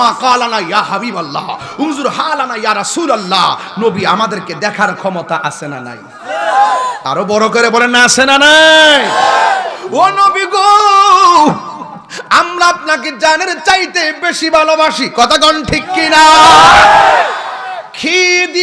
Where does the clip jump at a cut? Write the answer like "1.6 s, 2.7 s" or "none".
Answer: 9.8 s